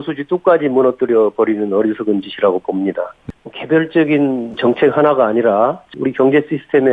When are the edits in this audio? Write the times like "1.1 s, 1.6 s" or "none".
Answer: 3.1 s, 4.6 s, 5.9 s